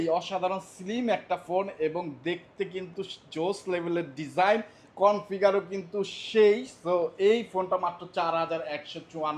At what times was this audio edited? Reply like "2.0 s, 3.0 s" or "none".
none